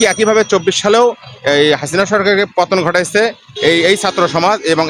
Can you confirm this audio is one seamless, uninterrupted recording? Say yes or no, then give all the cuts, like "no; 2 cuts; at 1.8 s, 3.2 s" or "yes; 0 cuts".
yes; 0 cuts